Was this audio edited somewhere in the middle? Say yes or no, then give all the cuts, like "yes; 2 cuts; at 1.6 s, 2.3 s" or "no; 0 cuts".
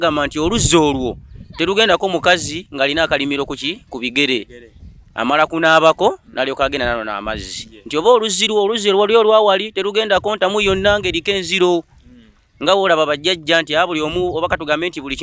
no; 0 cuts